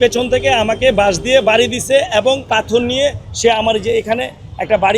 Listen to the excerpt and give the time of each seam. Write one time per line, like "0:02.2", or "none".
0:02.5

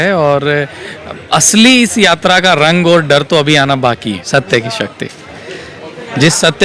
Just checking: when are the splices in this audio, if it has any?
0:04.1

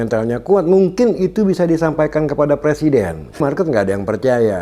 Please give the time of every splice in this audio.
0:03.4

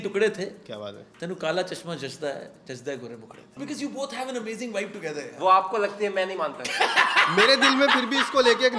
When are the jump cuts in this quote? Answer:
0:03.5

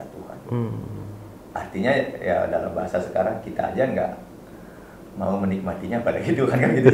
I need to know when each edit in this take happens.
none

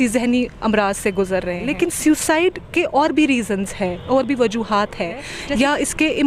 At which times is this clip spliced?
0:01.6
0:05.4

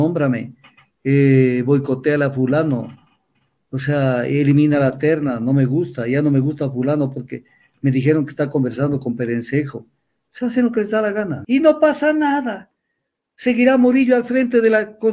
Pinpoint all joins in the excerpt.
0:11.4

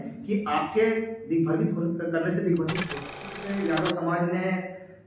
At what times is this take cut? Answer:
0:03.4

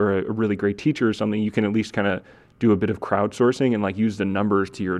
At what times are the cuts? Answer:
none

